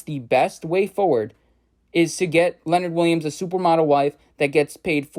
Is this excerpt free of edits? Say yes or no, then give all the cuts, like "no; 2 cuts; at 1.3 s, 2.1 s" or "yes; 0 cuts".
yes; 0 cuts